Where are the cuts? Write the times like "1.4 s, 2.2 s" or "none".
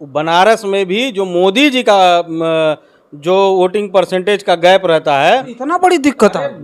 5.5 s

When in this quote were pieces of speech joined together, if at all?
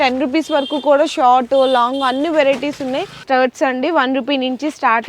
3.2 s

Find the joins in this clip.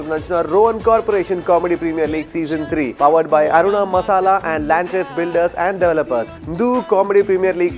2.9 s, 6.4 s

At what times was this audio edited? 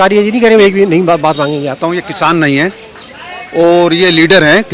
1.9 s

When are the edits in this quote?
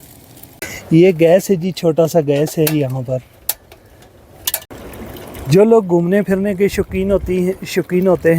4.7 s

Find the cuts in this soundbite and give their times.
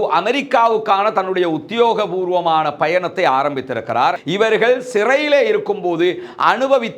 4.2 s

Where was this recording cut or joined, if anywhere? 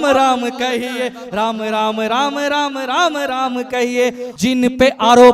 4.3 s

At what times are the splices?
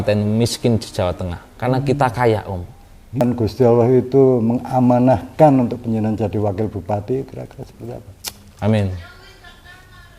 3.2 s

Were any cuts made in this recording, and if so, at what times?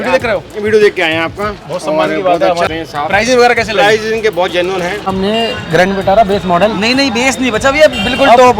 2.7 s, 5.1 s

